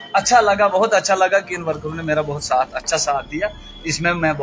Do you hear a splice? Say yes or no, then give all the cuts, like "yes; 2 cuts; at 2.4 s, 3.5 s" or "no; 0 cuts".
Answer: no; 0 cuts